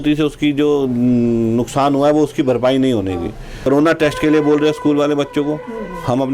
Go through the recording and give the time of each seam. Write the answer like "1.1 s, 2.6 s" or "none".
3.5 s